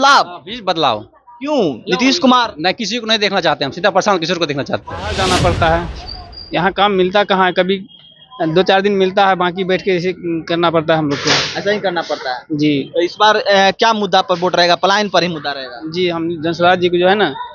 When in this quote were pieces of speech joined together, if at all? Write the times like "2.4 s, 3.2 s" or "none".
5.1 s